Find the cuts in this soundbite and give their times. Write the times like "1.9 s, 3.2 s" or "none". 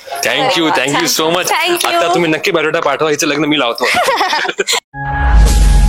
4.8 s